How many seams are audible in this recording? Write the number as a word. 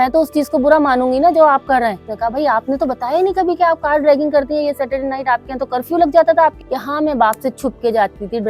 two